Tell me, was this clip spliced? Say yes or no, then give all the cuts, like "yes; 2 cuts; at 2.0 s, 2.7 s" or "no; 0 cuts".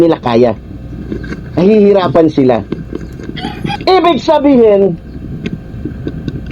yes; 1 cut; at 3.8 s